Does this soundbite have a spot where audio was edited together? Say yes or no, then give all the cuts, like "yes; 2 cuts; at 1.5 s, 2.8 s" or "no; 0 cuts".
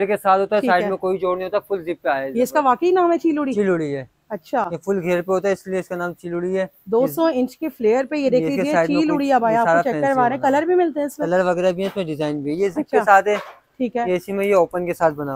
no; 0 cuts